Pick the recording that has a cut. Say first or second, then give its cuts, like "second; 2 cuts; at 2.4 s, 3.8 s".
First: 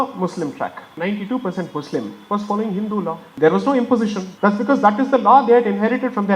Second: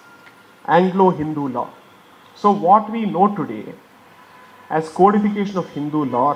first; 3 cuts; at 0.9 s, 3.3 s, 4.3 s